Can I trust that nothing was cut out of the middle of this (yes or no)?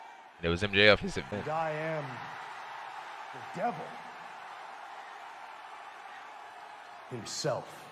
no